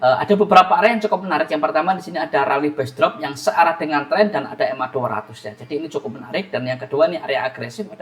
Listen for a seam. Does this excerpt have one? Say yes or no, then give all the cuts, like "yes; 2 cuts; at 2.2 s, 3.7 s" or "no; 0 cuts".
no; 0 cuts